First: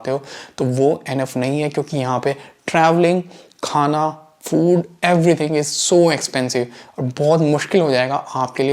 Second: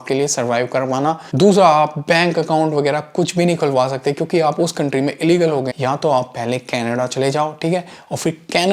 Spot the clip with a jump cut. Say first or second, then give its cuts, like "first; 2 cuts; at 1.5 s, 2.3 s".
second; 2 cuts; at 1.3 s, 5.7 s